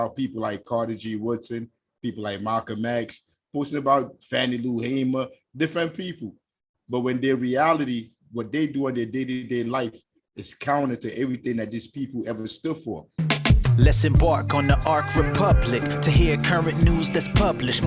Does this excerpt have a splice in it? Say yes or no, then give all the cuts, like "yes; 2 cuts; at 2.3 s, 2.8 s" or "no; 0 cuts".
yes; 1 cut; at 13.0 s